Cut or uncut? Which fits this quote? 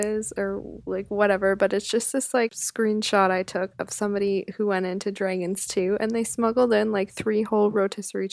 cut